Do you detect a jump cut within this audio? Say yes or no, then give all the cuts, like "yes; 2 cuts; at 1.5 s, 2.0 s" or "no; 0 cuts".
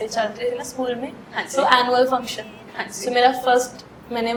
no; 0 cuts